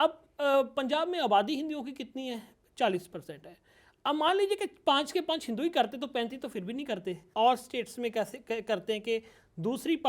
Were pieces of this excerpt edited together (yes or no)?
yes